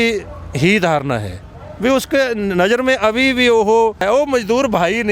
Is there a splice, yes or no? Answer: yes